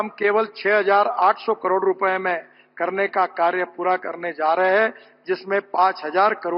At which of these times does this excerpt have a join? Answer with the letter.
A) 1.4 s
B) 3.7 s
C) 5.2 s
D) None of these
D